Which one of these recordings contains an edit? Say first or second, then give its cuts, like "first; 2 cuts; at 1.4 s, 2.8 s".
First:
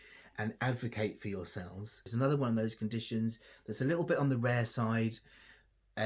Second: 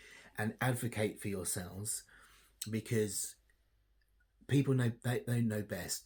first; 1 cut; at 2.1 s